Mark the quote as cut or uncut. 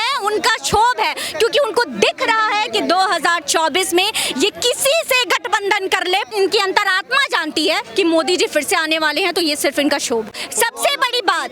cut